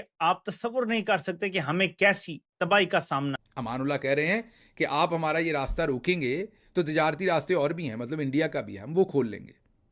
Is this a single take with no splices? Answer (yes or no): no